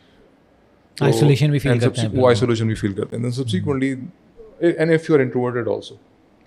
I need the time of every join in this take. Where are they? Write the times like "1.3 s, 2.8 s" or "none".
none